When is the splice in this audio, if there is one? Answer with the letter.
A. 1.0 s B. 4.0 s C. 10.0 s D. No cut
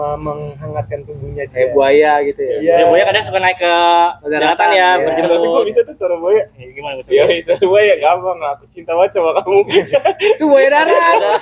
D